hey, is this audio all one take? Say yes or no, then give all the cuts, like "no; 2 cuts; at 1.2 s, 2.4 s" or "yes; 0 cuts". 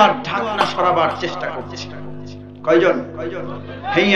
yes; 0 cuts